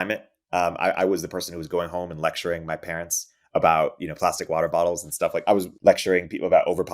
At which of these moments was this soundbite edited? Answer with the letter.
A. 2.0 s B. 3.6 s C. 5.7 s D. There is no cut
C